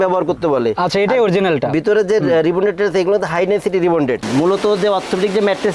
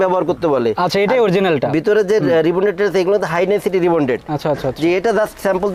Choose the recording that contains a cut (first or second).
first